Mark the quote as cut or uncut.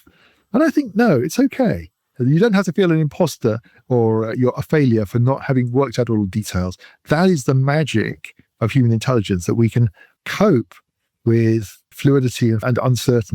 cut